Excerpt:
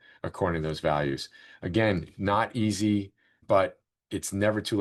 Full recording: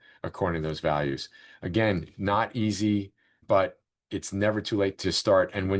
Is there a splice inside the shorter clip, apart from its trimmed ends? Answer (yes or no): no